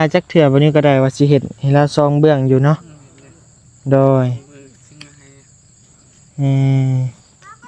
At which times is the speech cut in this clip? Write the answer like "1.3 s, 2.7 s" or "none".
none